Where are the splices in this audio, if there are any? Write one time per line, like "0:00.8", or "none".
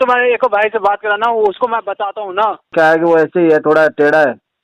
0:02.7